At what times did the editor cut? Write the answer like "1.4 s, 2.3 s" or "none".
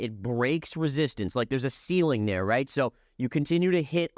none